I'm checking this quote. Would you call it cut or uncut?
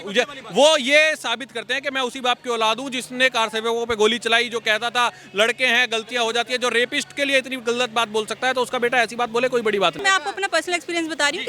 cut